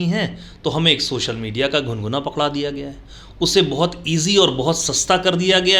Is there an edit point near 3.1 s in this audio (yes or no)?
no